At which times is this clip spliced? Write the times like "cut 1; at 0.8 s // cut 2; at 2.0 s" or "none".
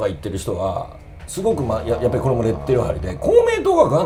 none